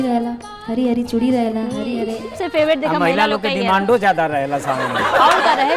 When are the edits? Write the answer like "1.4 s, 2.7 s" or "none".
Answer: 2.3 s